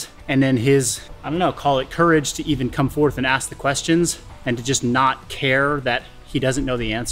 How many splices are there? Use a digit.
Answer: 0